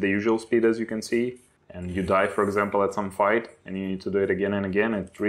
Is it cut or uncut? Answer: uncut